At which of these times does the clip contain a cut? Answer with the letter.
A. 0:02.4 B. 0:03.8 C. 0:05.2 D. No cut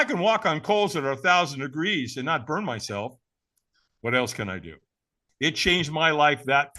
C